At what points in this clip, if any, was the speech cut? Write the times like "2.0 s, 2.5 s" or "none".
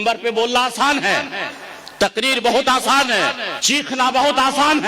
3.5 s